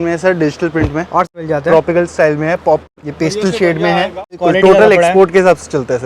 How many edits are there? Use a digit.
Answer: 3